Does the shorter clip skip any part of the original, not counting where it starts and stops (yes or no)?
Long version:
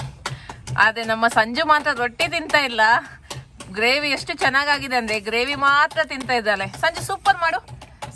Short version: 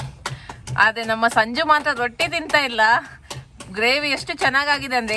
no